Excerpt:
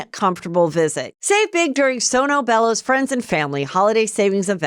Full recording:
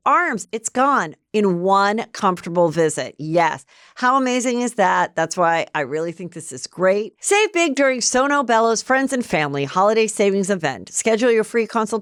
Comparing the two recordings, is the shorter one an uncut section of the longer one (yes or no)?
no